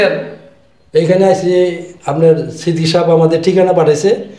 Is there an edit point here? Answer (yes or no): no